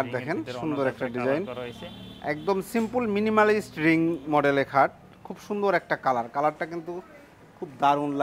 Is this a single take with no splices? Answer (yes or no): yes